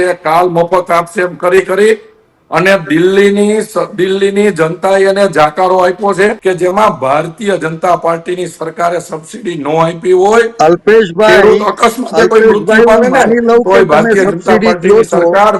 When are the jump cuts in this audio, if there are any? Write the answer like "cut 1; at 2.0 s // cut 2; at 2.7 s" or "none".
cut 1; at 6.4 s